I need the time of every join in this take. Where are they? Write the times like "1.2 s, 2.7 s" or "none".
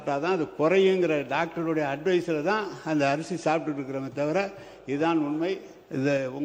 none